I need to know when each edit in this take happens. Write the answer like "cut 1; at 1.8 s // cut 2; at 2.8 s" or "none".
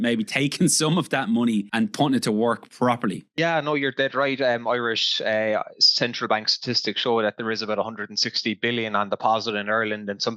cut 1; at 1.7 s // cut 2; at 3.3 s